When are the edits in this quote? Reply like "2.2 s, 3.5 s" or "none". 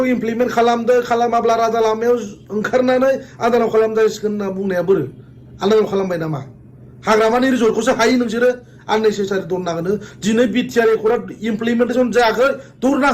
none